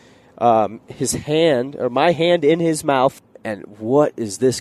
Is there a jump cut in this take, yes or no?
yes